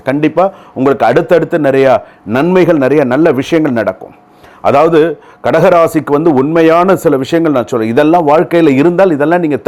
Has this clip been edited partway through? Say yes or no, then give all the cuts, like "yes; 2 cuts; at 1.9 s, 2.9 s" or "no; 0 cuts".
no; 0 cuts